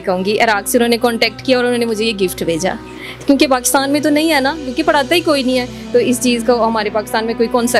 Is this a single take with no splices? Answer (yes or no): yes